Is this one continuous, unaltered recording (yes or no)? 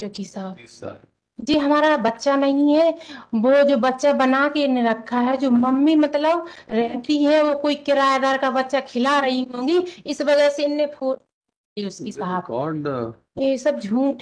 yes